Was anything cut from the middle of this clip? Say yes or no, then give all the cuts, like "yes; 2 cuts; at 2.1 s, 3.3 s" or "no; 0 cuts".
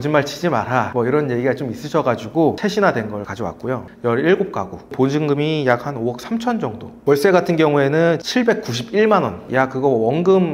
yes; 4 cuts; at 2.6 s, 3.8 s, 4.9 s, 9.4 s